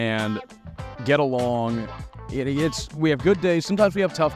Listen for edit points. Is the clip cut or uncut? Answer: uncut